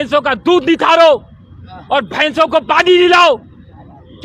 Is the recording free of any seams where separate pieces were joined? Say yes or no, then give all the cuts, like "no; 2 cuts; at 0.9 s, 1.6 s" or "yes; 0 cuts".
yes; 0 cuts